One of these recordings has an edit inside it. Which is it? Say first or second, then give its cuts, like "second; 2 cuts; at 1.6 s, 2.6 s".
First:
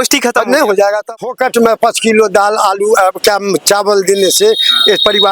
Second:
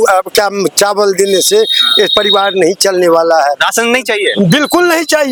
first; 1 cut; at 1.1 s